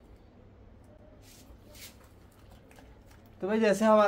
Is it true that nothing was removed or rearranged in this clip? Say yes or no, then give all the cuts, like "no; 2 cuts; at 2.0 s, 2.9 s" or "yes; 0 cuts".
yes; 0 cuts